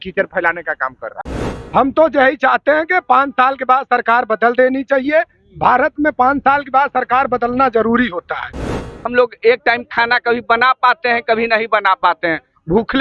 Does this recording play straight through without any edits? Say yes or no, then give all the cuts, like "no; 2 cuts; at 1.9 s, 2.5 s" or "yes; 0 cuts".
no; 2 cuts; at 1.2 s, 8.8 s